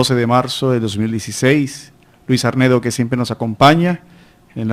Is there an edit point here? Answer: yes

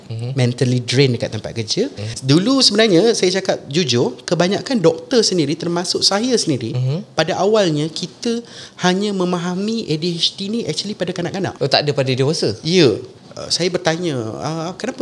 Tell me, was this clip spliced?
yes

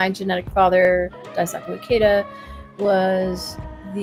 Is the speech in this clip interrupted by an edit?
no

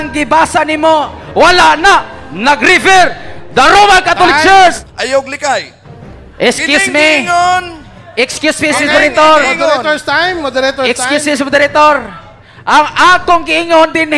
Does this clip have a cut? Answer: yes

